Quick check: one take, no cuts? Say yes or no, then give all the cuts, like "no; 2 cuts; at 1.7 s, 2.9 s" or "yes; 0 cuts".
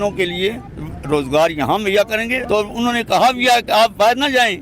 no; 1 cut; at 2.4 s